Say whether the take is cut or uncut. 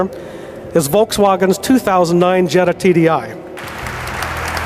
cut